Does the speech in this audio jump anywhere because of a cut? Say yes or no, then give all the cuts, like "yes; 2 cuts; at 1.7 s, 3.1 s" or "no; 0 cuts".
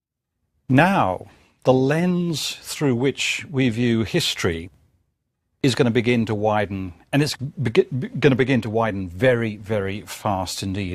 no; 0 cuts